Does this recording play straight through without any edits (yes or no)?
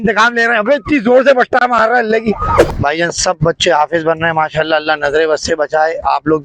no